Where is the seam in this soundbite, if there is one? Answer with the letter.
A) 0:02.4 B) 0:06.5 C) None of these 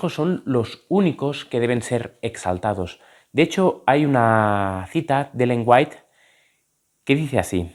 C